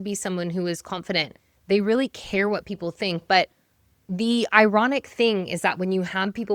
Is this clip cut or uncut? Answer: uncut